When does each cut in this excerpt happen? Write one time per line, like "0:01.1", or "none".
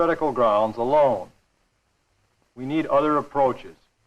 0:02.9